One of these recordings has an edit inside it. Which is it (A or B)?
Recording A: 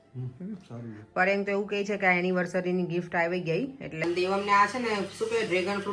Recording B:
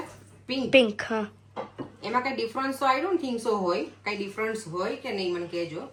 A